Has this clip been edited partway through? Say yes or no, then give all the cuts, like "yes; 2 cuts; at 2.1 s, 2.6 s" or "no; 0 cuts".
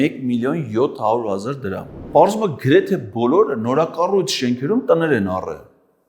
yes; 1 cut; at 1.9 s